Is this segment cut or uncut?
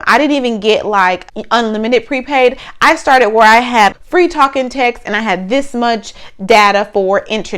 cut